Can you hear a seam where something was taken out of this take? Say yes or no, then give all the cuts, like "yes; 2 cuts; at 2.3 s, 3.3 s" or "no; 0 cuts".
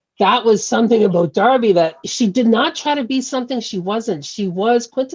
yes; 1 cut; at 2.0 s